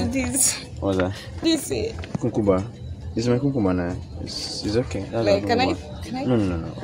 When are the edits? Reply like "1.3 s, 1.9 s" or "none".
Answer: 1.3 s